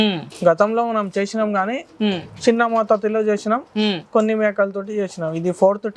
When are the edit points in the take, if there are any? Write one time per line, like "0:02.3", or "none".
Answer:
none